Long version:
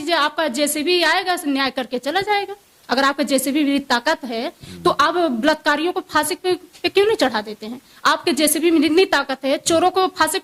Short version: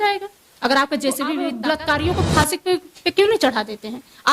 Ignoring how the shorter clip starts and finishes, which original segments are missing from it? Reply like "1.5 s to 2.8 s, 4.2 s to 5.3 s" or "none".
3.8 s to 5.3 s

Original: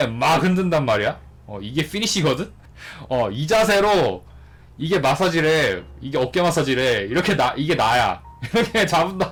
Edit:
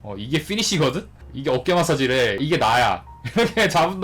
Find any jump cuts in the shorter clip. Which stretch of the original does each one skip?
2.7 s to 5.9 s, 7.1 s to 7.6 s

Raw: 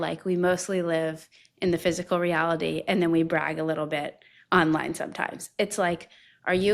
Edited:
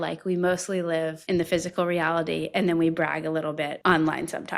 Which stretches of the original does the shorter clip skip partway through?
1.2 s to 1.5 s, 4.1 s to 4.4 s

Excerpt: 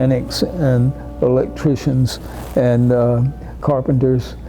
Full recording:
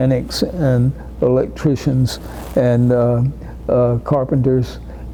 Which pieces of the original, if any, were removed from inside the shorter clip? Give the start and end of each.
3.6 s to 4.0 s

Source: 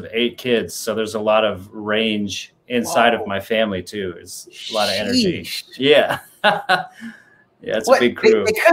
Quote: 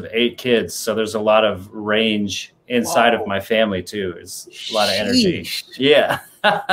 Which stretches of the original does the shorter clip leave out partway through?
none

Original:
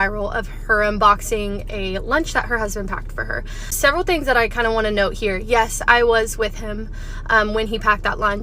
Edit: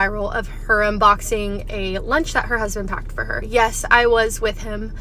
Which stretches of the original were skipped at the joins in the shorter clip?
3.4 s to 5.4 s

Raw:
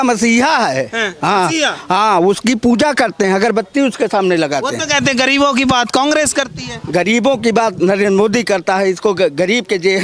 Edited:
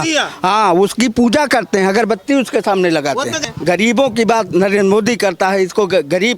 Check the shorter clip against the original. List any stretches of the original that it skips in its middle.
4.8 s to 6.6 s

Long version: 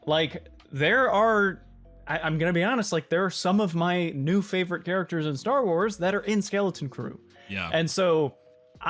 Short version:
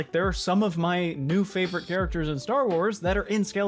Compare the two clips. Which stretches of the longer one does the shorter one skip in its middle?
none

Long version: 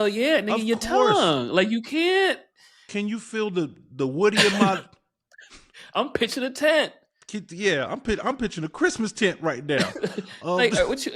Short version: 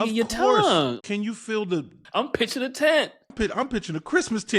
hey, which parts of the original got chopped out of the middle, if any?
1.5 s to 2.8 s, 3.8 s to 5.8 s, 7.1 s to 8.0 s

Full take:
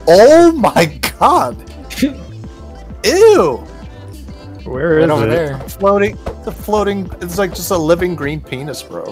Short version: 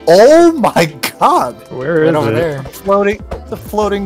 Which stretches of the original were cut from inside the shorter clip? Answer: 1.7 s to 4.6 s

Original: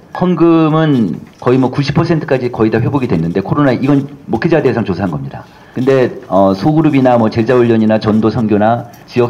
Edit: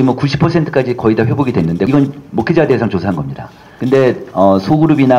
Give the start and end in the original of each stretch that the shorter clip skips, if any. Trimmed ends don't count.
3.4 s to 3.8 s

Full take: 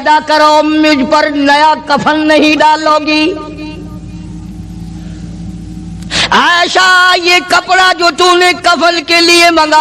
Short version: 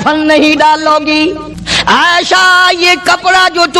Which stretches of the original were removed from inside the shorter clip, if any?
3.5 s to 5.9 s

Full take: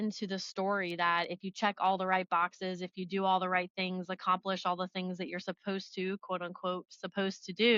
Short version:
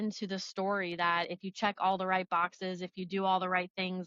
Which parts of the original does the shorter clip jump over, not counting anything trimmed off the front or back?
none

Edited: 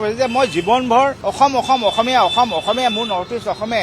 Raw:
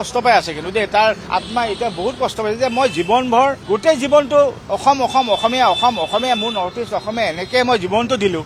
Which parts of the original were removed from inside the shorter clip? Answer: 3.6 s to 4.6 s

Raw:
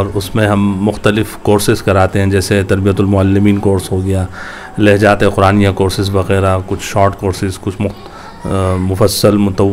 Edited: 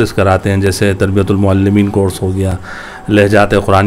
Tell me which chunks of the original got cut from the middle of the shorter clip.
none

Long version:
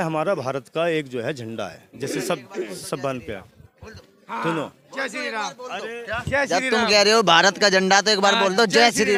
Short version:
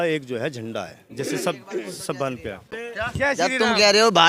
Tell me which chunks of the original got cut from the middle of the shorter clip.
3.6 s to 5.9 s

